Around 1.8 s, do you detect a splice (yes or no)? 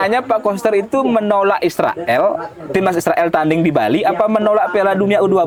no